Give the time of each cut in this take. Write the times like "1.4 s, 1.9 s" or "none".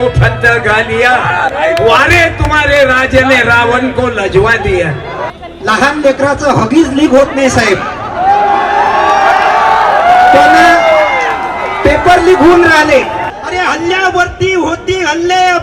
5.1 s, 13.3 s